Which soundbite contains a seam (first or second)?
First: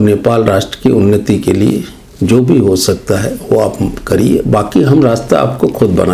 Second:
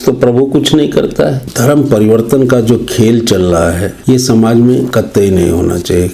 second